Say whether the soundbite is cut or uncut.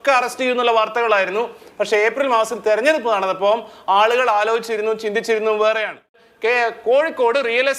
cut